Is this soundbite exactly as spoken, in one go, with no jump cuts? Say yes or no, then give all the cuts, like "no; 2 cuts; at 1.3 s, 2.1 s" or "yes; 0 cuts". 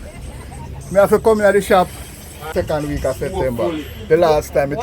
no; 1 cut; at 2.5 s